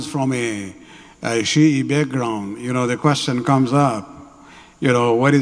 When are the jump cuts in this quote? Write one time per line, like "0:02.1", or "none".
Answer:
none